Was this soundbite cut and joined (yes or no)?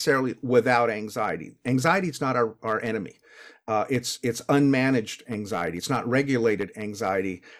no